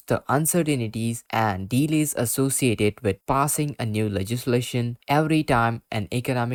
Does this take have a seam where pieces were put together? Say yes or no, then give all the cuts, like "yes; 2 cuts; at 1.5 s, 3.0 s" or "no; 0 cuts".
no; 0 cuts